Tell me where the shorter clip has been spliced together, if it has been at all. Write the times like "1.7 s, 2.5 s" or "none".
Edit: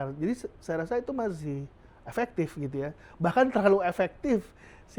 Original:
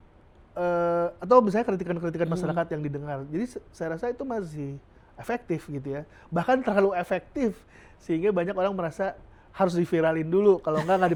none